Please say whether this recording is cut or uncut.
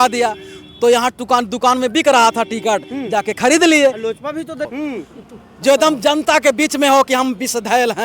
cut